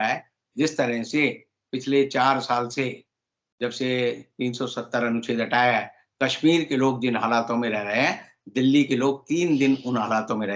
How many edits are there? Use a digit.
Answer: 0